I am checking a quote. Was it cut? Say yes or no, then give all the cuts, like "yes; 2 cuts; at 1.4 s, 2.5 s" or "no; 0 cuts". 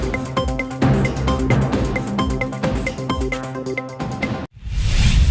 yes; 1 cut; at 4.4 s